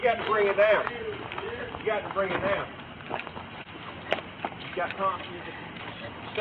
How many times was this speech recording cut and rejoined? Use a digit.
1